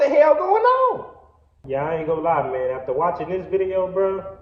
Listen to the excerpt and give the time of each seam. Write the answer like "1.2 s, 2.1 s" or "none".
1.6 s